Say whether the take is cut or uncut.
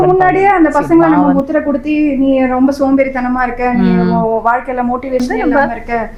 uncut